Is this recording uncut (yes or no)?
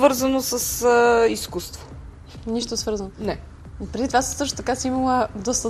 yes